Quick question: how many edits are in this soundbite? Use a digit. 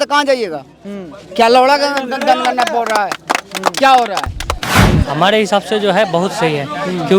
1